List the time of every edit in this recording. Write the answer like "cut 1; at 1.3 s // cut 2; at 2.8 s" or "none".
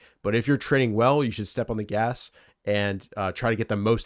none

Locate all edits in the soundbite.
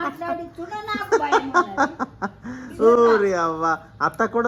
none

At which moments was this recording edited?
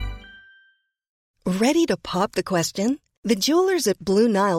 cut 1; at 1.3 s

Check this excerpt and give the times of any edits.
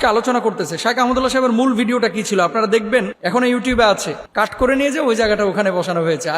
cut 1; at 3.2 s // cut 2; at 4.2 s

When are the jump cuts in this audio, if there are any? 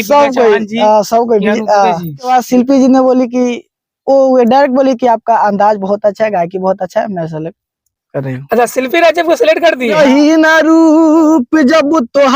cut 1; at 2.3 s // cut 2; at 10.0 s

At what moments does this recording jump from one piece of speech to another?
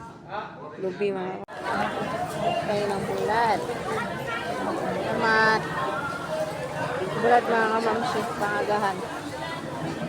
cut 1; at 1.4 s

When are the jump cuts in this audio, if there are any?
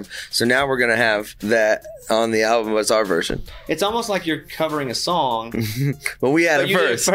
cut 1; at 1.3 s

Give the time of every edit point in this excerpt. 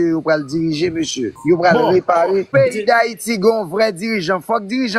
cut 1; at 1.4 s // cut 2; at 2.5 s

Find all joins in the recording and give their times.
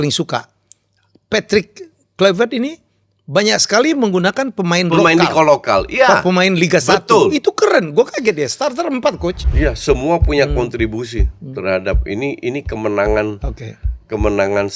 cut 1; at 9.4 s

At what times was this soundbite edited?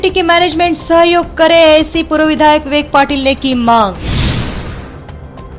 cut 1; at 4.6 s

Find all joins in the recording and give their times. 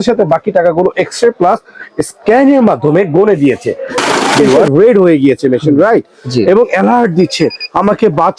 cut 1; at 4.3 s

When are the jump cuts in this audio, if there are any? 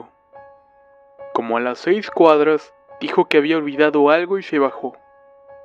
cut 1; at 3.7 s

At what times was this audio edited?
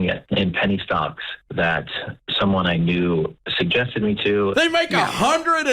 cut 1; at 4.5 s

